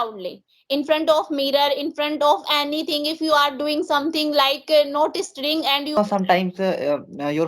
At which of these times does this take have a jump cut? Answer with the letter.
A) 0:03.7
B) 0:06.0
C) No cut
B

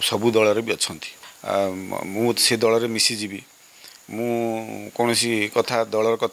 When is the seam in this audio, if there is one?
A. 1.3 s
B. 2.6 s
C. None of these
A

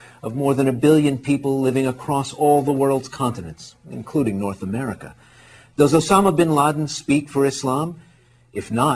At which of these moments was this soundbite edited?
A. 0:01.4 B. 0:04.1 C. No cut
B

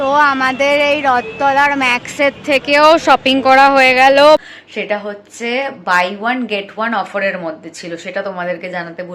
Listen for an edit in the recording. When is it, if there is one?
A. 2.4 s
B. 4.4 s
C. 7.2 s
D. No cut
B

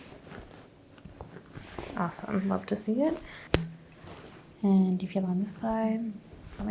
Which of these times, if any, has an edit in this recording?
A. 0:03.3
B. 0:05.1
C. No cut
A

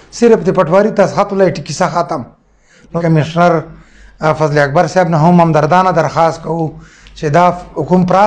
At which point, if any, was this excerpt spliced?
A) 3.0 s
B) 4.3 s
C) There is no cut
A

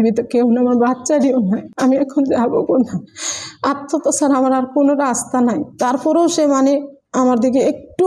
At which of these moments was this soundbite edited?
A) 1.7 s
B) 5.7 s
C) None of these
A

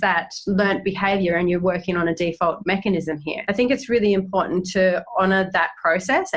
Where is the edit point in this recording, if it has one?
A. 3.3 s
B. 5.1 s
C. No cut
A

